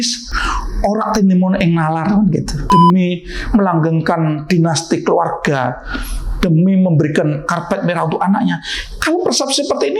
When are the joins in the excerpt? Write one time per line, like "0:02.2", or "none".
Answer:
0:02.6